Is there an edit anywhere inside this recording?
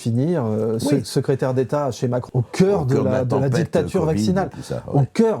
yes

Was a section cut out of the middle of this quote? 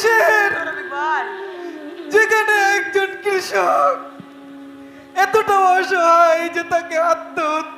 no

